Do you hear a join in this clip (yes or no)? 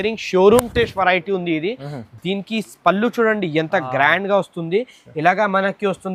no